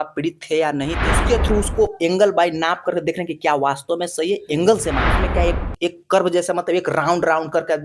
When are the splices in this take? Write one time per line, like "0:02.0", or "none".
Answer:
0:01.0
0:05.1